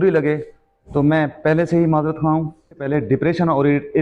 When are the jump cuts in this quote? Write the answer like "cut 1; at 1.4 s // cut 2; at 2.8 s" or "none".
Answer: cut 1; at 2.9 s